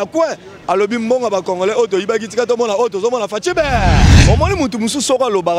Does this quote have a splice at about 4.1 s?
yes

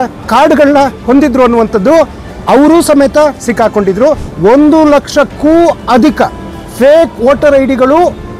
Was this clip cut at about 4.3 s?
yes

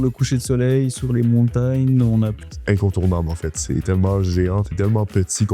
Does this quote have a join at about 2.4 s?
yes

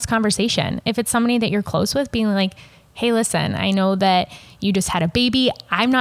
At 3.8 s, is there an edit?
no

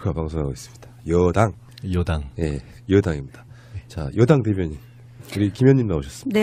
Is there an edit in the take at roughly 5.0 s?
no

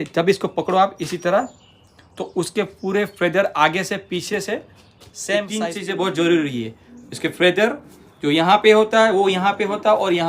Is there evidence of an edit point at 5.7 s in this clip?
yes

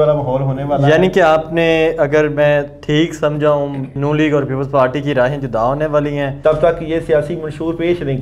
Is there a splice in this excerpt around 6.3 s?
yes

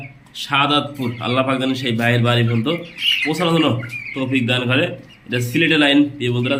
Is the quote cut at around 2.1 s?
no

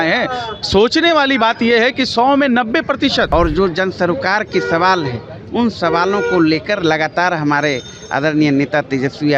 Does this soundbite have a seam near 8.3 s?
no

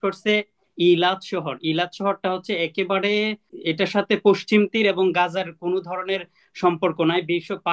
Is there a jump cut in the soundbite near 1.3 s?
no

